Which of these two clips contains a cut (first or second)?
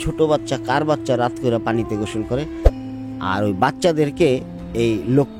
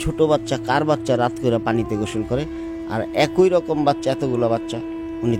first